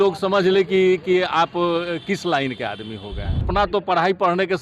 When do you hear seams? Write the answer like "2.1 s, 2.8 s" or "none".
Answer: 3.5 s

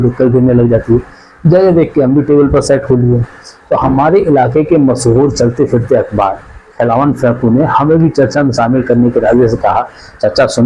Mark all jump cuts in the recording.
none

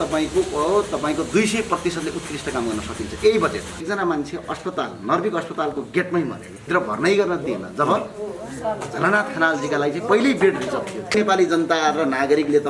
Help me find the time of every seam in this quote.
3.8 s, 6.7 s, 11.1 s

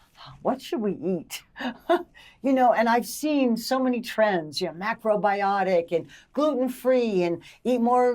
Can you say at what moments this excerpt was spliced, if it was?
none

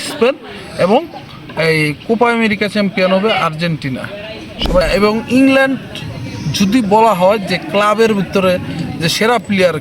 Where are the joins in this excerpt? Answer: 4.8 s

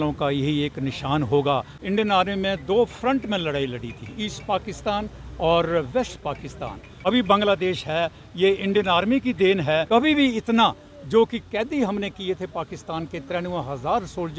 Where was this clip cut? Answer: 1.7 s, 6.9 s, 9.9 s

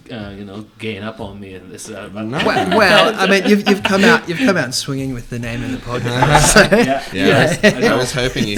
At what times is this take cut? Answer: none

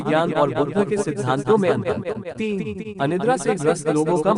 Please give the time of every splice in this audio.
2.2 s

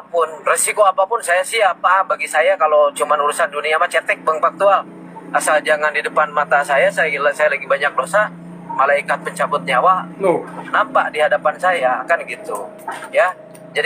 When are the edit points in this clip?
none

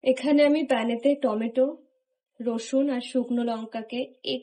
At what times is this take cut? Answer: none

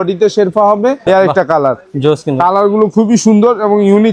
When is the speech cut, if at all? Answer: 1.0 s

